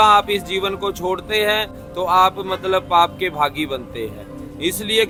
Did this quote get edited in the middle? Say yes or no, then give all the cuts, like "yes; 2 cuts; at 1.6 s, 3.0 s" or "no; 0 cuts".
no; 0 cuts